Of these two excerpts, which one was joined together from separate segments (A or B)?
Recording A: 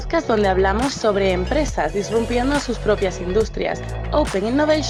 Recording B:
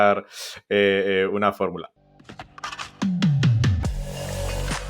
B